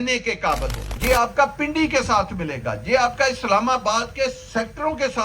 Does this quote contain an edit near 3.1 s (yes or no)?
no